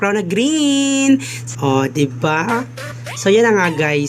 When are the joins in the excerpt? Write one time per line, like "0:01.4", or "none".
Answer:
0:01.4